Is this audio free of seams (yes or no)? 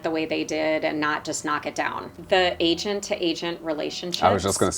no